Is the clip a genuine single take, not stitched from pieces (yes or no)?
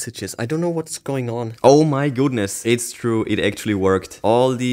no